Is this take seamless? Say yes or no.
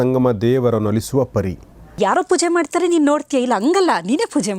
no